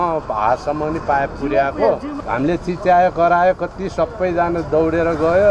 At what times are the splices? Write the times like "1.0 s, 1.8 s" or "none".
2.2 s